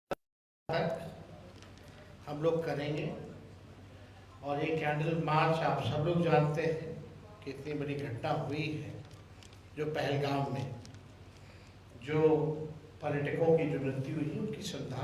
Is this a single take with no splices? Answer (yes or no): yes